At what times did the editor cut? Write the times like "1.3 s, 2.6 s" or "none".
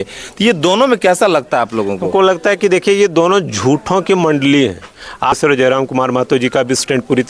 5.4 s